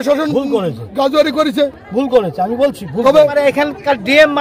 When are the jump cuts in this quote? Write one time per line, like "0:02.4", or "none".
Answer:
0:03.3